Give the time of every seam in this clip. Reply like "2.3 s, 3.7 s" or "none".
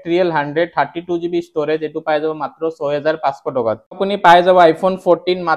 4.0 s